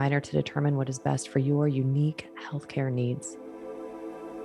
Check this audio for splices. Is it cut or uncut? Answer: cut